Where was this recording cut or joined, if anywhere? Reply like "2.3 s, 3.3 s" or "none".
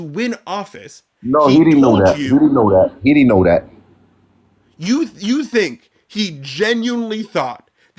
none